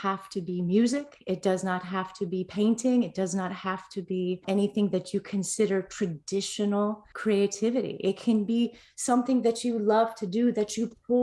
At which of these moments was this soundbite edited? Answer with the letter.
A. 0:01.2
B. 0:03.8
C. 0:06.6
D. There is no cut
D